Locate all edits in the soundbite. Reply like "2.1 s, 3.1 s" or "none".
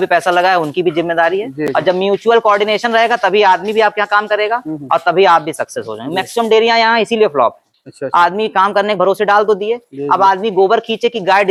none